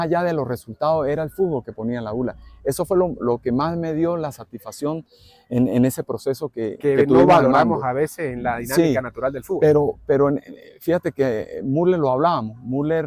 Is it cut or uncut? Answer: uncut